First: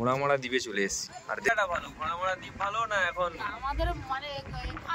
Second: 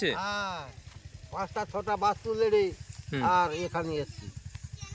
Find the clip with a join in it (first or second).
first